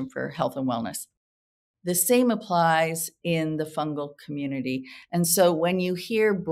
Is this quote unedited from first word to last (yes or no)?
yes